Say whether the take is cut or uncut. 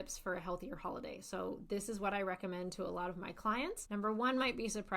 cut